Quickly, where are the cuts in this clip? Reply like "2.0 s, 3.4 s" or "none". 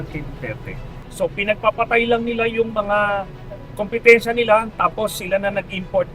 1.0 s